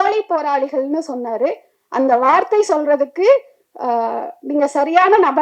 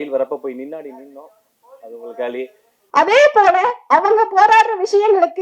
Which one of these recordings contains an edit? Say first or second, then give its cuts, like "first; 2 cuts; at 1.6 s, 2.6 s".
second; 1 cut; at 2.8 s